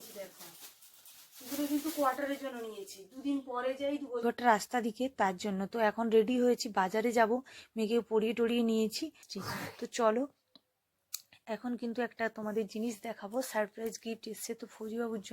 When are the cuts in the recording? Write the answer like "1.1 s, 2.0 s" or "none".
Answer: 4.2 s, 9.3 s

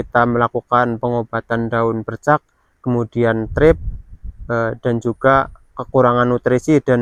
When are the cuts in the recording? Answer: none

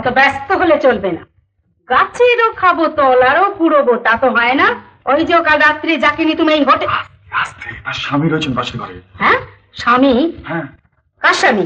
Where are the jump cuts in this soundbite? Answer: 4.9 s

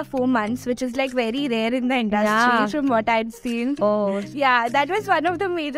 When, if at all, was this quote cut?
none

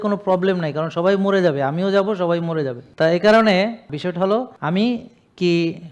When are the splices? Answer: 2.8 s, 4.3 s

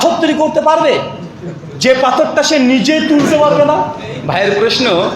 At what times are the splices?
4.1 s

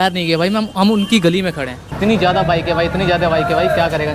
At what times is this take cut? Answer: 1.8 s

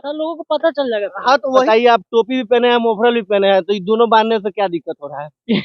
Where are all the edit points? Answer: 1.5 s

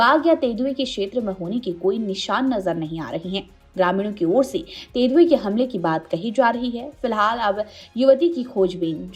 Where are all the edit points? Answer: none

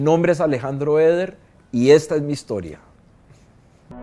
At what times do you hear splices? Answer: none

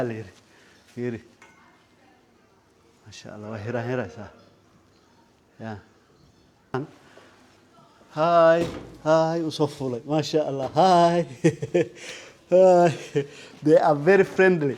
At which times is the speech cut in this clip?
6.7 s

